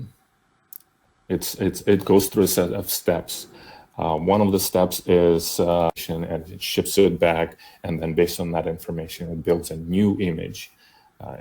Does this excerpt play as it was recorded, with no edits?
no; 1 cut; at 6.1 s

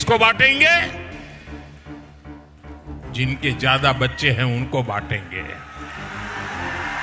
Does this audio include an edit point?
no; 0 cuts

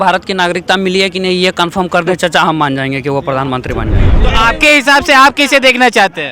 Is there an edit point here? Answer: yes; 1 cut; at 4.1 s

